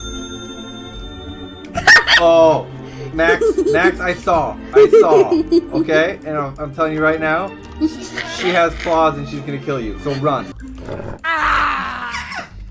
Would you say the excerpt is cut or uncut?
cut